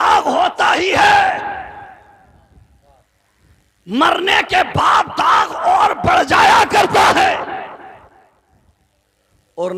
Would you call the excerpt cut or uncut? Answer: uncut